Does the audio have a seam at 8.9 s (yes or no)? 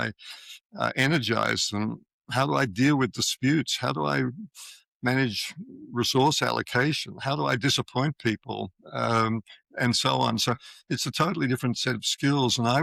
no